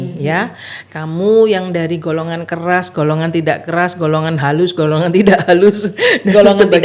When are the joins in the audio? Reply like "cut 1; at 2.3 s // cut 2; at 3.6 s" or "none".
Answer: none